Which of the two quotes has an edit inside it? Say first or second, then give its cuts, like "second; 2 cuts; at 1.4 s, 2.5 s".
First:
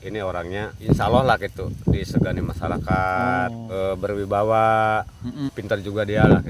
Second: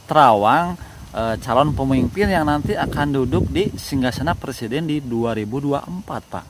first; 3 cuts; at 0.8 s, 3.6 s, 5.4 s